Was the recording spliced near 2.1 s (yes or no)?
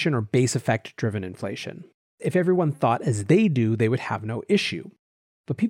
yes